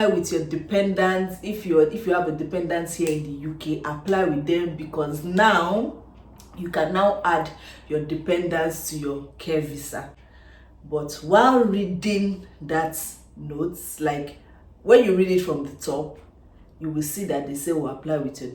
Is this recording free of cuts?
yes; 0 cuts

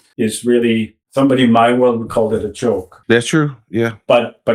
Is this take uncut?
no; 2 cuts; at 1.0 s, 2.9 s

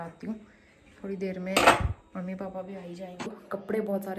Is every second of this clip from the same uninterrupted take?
no; 1 cut; at 3.3 s

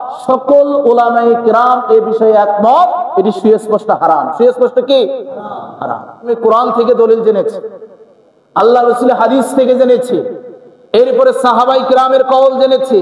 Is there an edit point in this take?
yes; 1 cut; at 6.3 s

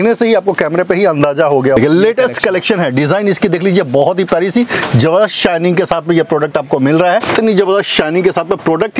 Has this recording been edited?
yes; 2 cuts; at 1.8 s, 7.3 s

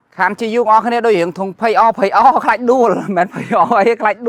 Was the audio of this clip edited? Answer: no; 0 cuts

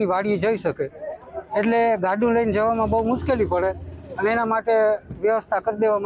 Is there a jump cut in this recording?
no; 0 cuts

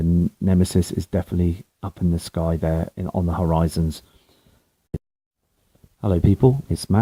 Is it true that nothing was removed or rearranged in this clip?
yes; 0 cuts

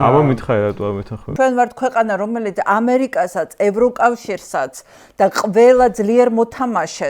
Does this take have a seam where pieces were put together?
yes; 1 cut; at 1.2 s

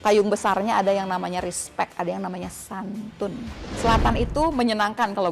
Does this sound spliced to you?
yes; 1 cut; at 3.7 s

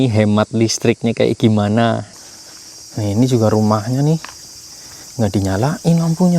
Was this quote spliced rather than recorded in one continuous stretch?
yes; 1 cut; at 2.1 s

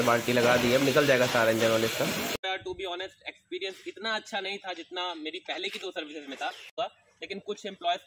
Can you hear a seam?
yes; 2 cuts; at 2.3 s, 6.7 s

